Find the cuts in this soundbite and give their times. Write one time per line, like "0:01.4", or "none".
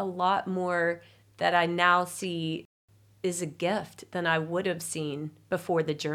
0:02.6